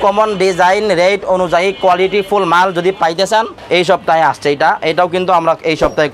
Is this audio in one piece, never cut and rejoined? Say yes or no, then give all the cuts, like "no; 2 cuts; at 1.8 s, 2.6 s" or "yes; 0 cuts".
no; 1 cut; at 3.5 s